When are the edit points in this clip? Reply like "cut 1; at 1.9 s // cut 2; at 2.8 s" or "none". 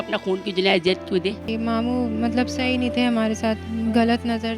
cut 1; at 1.4 s // cut 2; at 3.7 s